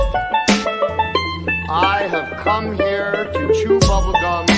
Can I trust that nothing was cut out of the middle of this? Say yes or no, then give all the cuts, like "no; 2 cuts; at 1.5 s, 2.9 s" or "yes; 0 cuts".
no; 1 cut; at 1.1 s